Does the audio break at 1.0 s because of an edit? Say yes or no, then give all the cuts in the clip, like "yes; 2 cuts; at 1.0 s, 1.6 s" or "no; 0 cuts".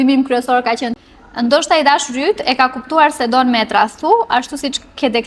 yes; 1 cut; at 1.0 s